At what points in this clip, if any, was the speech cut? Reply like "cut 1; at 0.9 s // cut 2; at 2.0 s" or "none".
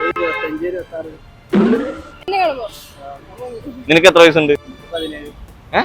cut 1; at 4.6 s